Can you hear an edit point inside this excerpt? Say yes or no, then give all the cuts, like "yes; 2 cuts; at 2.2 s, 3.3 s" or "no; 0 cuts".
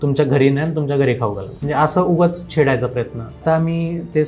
yes; 2 cuts; at 1.6 s, 3.4 s